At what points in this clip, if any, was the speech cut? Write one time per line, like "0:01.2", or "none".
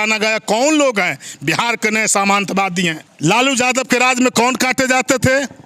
0:03.0